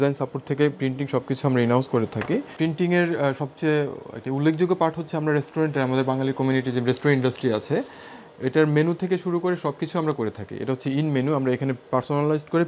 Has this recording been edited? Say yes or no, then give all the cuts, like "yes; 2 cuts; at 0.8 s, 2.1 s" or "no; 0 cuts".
yes; 1 cut; at 2.5 s